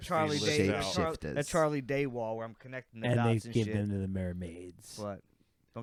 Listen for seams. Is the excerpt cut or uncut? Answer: uncut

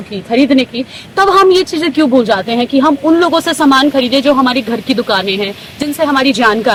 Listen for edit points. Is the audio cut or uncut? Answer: uncut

